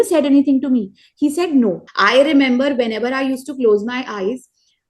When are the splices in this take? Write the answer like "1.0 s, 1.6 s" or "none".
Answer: 1.9 s